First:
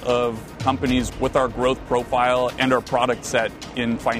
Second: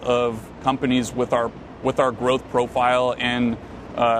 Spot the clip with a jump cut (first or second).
first